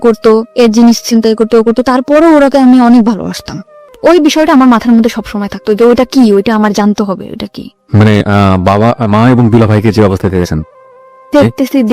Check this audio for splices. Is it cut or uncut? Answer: cut